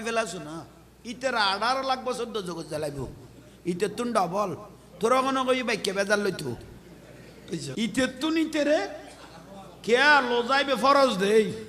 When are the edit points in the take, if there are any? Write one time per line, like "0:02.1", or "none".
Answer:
0:07.7